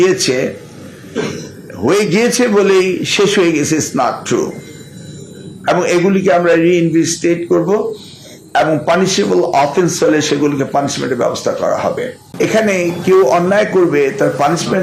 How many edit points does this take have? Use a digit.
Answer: 1